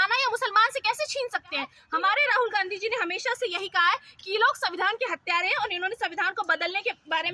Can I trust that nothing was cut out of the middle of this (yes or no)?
no